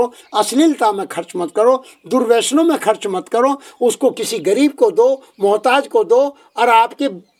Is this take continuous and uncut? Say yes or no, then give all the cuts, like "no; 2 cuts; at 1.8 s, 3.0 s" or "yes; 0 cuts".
yes; 0 cuts